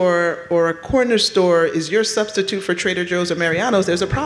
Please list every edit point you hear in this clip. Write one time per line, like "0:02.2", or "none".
none